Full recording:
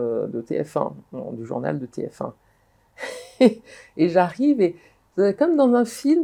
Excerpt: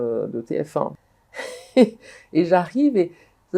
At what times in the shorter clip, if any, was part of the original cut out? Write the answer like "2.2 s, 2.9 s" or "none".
1.1 s